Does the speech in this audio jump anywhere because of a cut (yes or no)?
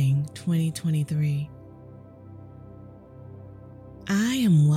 yes